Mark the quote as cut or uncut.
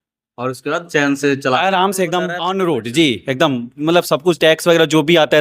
cut